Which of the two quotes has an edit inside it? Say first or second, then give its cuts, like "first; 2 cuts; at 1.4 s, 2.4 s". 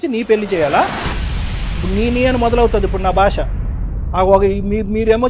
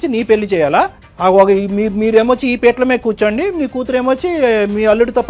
second; 1 cut; at 1.0 s